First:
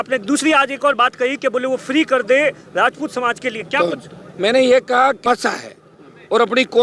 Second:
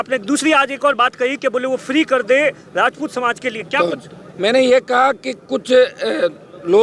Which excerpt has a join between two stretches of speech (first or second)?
first